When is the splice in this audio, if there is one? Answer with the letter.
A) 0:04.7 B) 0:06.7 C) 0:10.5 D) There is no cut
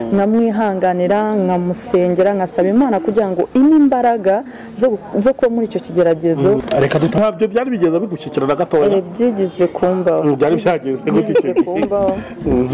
B